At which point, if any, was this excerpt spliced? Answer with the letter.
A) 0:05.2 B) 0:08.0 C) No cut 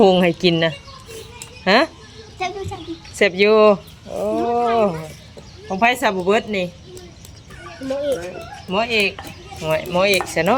C